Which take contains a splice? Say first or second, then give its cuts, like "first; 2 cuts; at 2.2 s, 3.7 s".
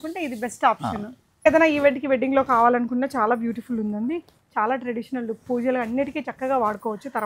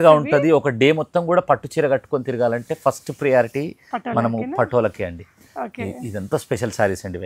first; 1 cut; at 1.5 s